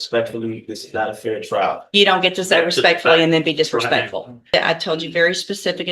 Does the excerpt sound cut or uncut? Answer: cut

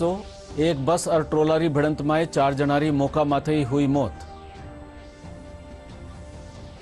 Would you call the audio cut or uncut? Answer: uncut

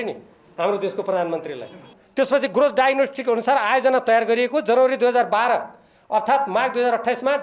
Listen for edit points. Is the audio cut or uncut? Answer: cut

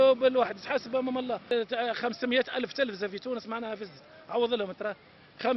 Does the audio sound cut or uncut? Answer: cut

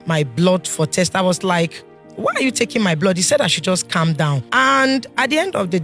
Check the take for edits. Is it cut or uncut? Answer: cut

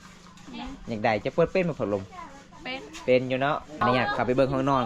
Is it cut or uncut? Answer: cut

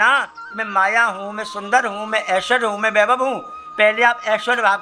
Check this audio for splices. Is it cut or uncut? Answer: uncut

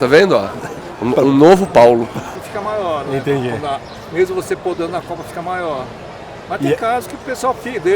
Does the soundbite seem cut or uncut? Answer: cut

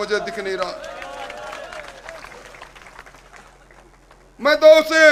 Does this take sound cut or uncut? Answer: uncut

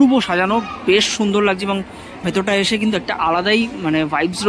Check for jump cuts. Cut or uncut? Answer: uncut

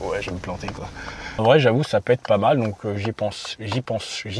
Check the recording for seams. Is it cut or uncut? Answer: cut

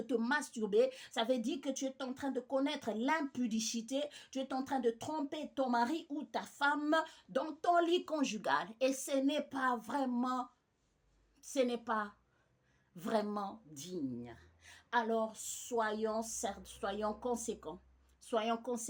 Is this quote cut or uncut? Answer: uncut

